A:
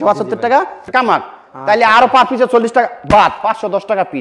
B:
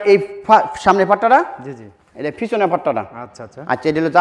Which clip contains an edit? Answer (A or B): A